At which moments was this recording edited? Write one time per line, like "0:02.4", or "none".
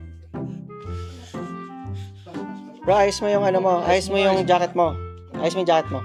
none